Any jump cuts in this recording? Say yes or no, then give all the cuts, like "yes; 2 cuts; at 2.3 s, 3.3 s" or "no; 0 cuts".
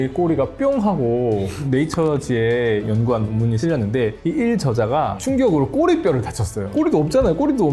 yes; 5 cuts; at 1.6 s, 2.9 s, 4.2 s, 5.2 s, 6.6 s